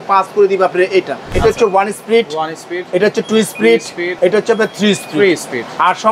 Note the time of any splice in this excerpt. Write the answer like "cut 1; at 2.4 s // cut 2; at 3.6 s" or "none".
cut 1; at 1.3 s // cut 2; at 4.1 s